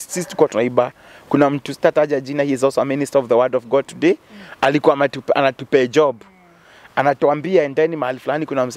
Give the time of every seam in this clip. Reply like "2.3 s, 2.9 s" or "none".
none